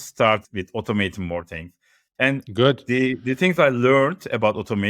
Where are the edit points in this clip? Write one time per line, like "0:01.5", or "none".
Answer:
none